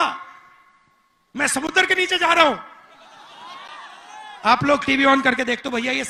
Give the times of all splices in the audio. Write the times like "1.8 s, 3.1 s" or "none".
none